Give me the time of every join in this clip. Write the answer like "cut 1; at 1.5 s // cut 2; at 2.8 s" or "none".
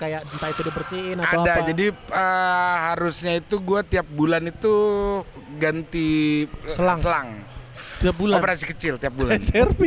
none